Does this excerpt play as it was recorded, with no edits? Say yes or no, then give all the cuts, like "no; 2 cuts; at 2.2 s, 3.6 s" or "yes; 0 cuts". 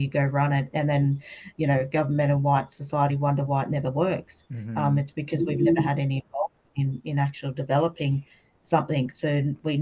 yes; 0 cuts